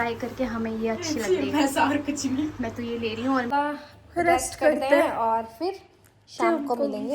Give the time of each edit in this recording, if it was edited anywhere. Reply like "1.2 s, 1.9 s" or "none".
3.5 s